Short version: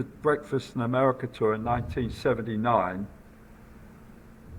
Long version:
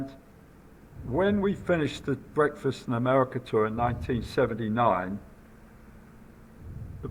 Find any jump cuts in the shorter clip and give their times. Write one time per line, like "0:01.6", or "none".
none